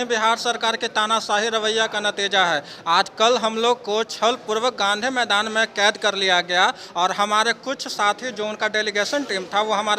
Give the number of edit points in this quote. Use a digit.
0